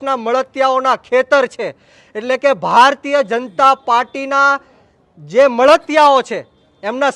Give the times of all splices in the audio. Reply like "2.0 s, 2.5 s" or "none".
none